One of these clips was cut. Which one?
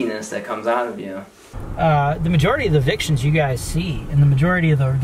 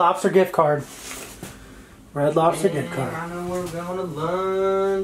first; 1 cut; at 1.6 s

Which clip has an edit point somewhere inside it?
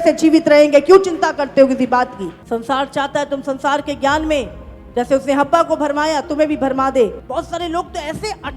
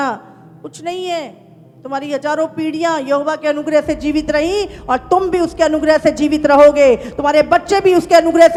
first; 2 cuts; at 2.3 s, 7.2 s

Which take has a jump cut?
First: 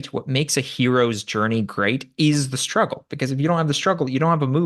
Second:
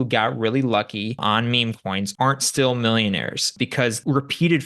second; 2 cuts; at 1.5 s, 3.5 s

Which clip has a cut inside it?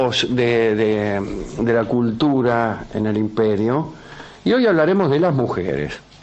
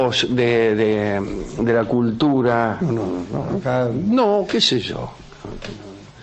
first; 1 cut; at 2.8 s

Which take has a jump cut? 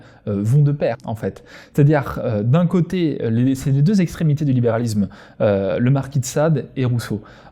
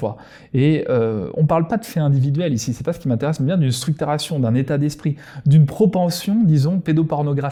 first; 1 cut; at 1.1 s

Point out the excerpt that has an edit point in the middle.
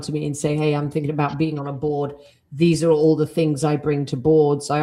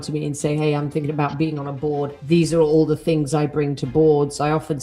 second; 1 cut; at 2.2 s

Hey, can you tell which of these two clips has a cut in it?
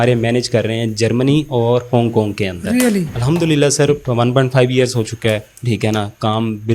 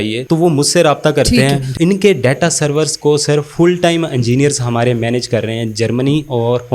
second; 1 cut; at 1.7 s

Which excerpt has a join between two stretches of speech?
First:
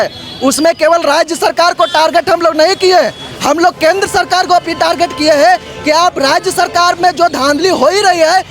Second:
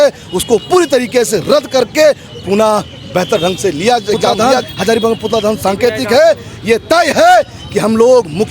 second; 1 cut; at 4.3 s

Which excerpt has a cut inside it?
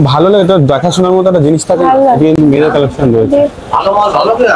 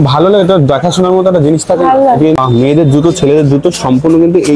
second; 1 cut; at 2.4 s

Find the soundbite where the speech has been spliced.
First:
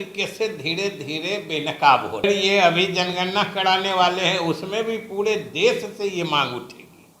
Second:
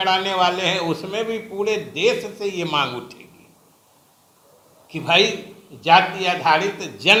first; 1 cut; at 2.2 s

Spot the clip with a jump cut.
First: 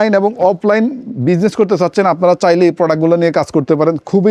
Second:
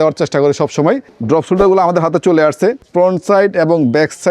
second; 2 cuts; at 1.1 s, 2.9 s

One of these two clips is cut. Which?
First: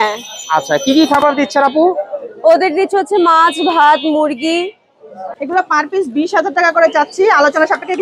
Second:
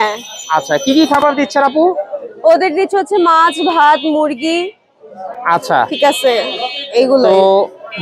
first; 1 cut; at 5.3 s

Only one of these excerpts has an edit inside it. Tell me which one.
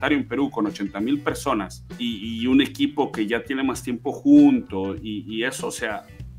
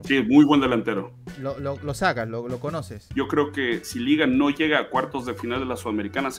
second; 1 cut; at 3.0 s

